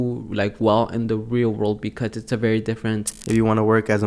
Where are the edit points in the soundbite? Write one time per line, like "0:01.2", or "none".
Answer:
0:03.1